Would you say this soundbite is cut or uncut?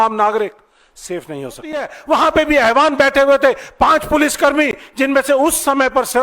cut